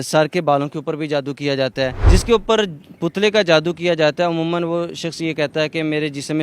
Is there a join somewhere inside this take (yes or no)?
yes